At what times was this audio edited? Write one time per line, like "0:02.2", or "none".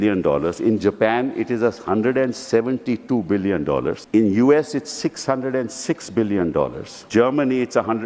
0:04.0
0:06.9